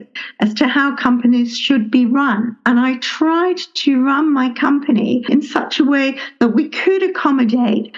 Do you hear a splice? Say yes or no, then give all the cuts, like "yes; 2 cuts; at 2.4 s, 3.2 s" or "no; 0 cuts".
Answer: yes; 1 cut; at 5.3 s